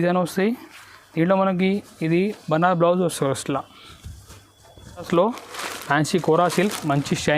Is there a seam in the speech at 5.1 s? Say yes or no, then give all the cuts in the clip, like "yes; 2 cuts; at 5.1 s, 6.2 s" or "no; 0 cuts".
yes; 1 cut; at 5.1 s